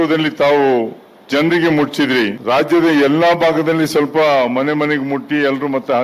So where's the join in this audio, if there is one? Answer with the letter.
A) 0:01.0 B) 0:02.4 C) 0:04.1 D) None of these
B